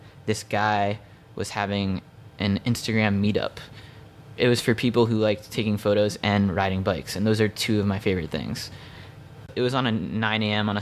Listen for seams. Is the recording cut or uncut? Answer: cut